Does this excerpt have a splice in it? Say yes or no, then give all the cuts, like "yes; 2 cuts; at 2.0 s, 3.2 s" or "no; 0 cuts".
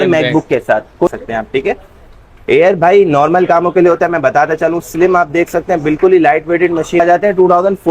yes; 2 cuts; at 1.1 s, 7.0 s